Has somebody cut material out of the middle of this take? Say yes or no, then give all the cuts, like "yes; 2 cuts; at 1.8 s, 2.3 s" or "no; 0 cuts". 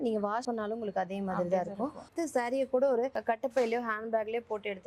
yes; 1 cut; at 2.0 s